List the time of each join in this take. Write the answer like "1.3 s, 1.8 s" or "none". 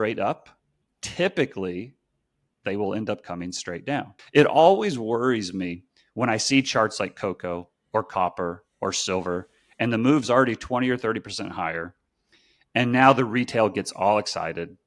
4.2 s